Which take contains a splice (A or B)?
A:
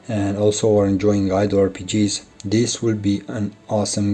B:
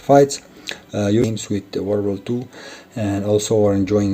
B